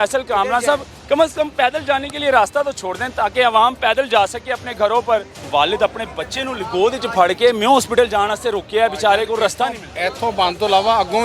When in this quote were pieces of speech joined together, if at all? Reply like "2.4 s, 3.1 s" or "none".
5.4 s